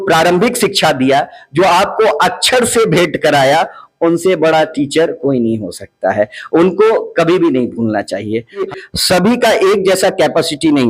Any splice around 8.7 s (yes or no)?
yes